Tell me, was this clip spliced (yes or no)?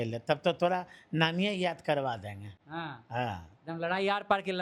no